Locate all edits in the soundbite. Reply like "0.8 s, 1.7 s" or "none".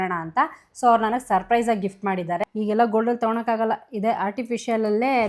2.4 s